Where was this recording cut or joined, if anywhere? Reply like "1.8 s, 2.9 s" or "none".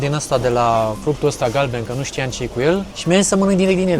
1.0 s, 2.9 s